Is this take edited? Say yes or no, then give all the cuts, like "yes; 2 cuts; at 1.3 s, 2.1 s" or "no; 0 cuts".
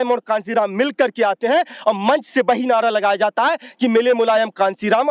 no; 0 cuts